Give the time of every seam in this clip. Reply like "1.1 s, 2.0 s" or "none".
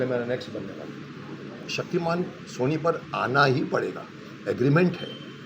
1.7 s